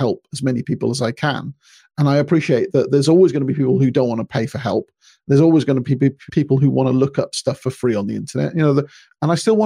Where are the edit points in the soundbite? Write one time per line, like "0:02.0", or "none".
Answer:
none